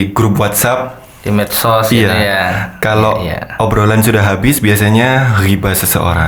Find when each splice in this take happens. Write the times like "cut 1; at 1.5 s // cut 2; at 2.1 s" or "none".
none